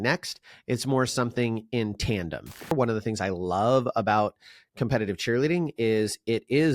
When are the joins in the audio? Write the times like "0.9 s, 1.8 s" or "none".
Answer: 2.7 s